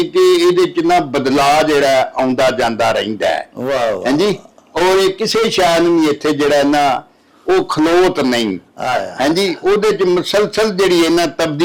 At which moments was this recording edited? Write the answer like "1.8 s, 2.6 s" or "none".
none